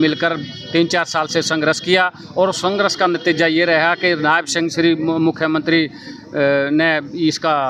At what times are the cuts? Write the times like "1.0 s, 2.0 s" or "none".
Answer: none